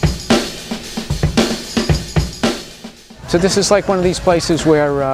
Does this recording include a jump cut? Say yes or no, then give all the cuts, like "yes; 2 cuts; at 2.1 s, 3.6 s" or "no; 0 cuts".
no; 0 cuts